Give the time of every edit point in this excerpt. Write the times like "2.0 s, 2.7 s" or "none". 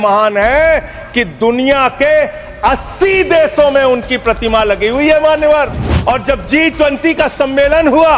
5.8 s